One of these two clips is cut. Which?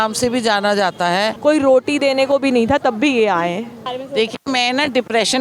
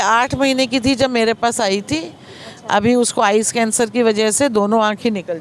first; 2 cuts; at 1.3 s, 3.8 s

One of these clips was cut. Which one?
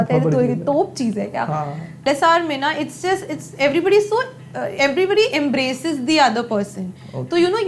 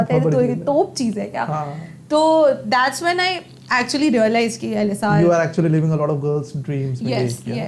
first; 1 cut; at 2.0 s

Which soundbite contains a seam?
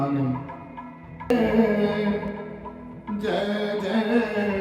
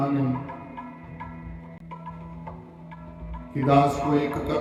first; 1 cut; at 1.3 s

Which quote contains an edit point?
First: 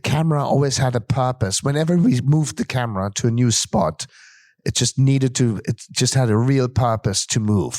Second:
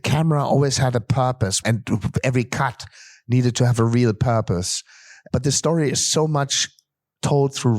second; 2 cuts; at 1.6 s, 5.1 s

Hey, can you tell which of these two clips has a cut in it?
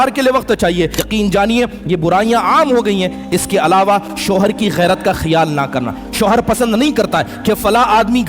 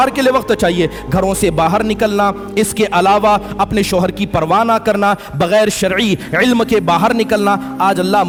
first; 1 cut; at 1.0 s

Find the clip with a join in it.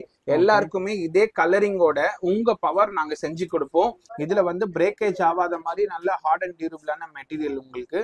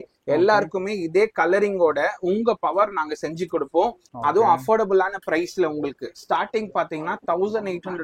first; 1 cut; at 4.0 s

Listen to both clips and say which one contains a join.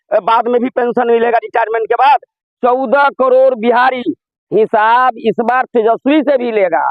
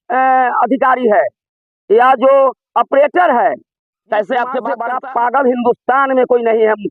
second; 1 cut; at 4.7 s

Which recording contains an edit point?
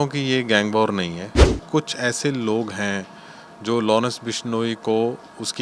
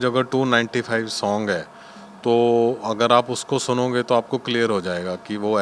first; 1 cut; at 1.5 s

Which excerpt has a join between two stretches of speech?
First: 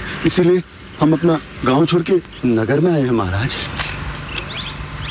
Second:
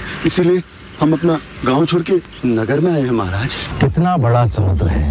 second; 1 cut; at 3.6 s

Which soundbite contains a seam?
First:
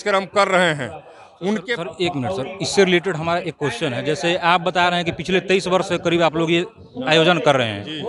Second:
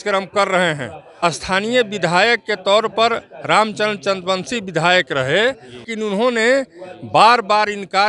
second; 2 cuts; at 1.0 s, 5.9 s

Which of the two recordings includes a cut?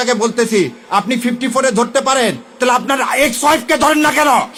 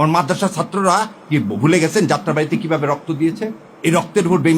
second; 1 cut; at 3.6 s

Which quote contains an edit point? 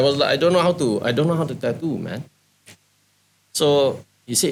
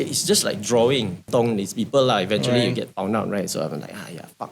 second; 1 cut; at 1.3 s

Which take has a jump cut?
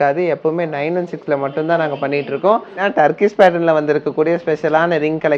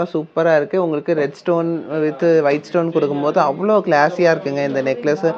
first; 1 cut; at 2.8 s

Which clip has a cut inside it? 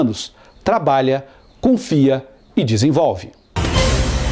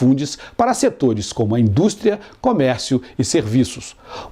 first; 1 cut; at 3.3 s

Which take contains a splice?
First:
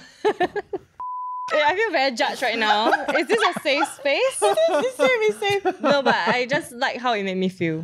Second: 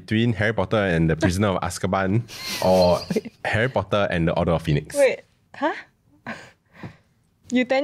first; 2 cuts; at 1.4 s, 5.6 s

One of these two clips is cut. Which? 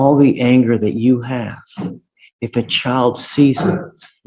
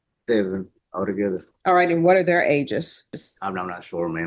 second; 1 cut; at 3.2 s

